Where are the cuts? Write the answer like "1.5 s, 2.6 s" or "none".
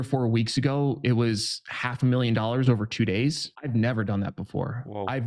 3.5 s